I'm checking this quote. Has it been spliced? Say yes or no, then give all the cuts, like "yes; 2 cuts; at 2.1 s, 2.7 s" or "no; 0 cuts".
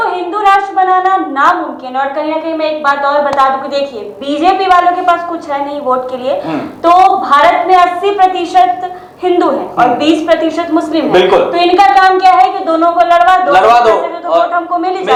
no; 0 cuts